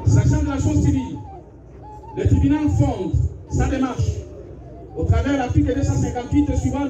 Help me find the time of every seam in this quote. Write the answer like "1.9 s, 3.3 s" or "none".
none